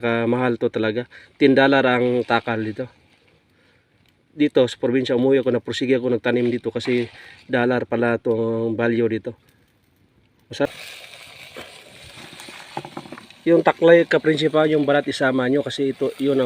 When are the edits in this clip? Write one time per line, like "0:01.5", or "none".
0:10.6